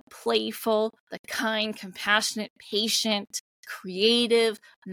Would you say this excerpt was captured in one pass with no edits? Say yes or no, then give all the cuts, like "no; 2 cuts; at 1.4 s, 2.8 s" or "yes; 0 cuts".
yes; 0 cuts